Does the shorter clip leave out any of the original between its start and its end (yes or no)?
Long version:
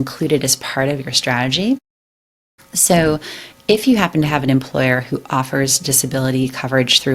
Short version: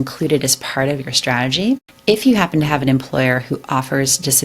yes